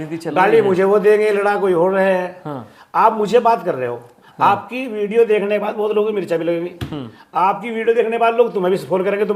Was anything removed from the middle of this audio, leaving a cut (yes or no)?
no